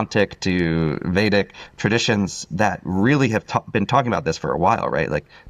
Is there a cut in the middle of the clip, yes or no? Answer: no